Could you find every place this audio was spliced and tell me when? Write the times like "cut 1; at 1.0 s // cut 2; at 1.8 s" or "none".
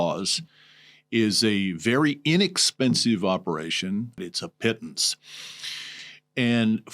cut 1; at 4.2 s